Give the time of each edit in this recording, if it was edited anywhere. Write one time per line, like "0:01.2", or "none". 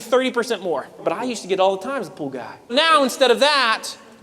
0:01.0
0:02.7